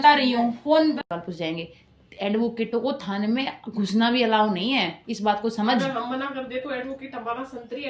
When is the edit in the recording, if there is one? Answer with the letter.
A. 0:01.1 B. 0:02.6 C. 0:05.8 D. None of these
A